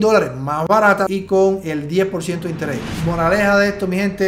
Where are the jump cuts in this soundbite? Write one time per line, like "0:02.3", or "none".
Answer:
0:01.0
0:02.9